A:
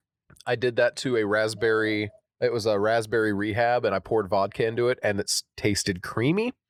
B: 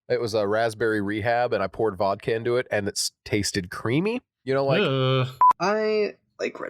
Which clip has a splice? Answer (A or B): B